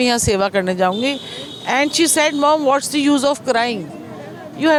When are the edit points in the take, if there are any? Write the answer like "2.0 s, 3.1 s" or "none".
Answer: none